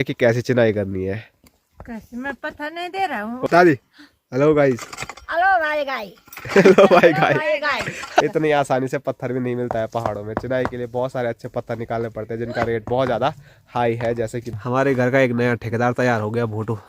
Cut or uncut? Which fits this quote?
cut